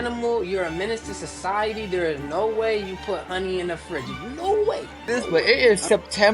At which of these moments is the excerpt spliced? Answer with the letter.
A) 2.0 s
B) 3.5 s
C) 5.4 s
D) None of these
C